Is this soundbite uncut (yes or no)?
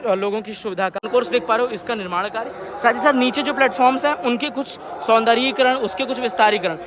no